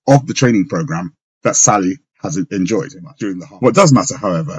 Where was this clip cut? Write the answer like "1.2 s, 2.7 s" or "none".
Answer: 3.0 s

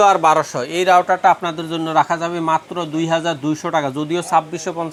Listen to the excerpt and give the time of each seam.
none

